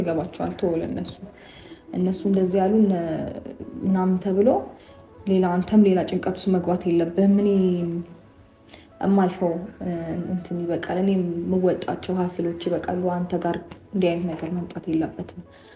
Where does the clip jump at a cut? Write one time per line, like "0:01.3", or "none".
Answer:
none